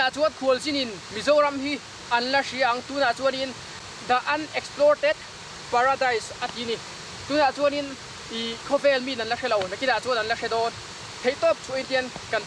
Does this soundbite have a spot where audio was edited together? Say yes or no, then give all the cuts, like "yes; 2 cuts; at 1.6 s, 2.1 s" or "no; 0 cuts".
yes; 1 cut; at 3.7 s